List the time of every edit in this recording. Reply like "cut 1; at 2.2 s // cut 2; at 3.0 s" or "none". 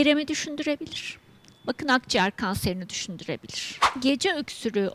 cut 1; at 3.9 s